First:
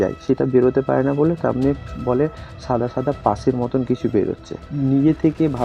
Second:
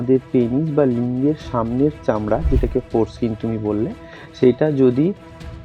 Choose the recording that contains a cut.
first; 1 cut; at 4.6 s

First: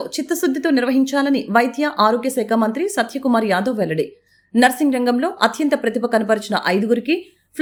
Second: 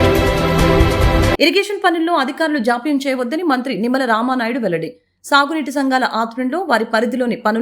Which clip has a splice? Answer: second; 1 cut; at 1.3 s

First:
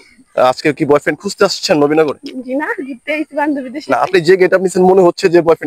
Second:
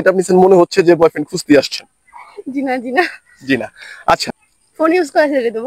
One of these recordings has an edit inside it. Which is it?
second; 1 cut; at 4.2 s

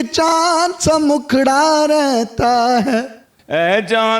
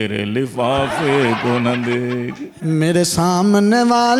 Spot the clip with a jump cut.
first; 1 cut; at 3.3 s

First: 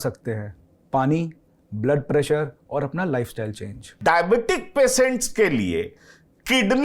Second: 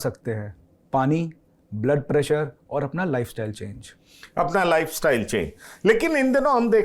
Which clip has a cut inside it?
first; 1 cut; at 4.0 s

